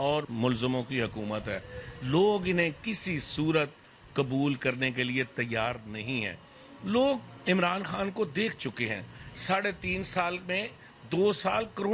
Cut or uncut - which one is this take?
uncut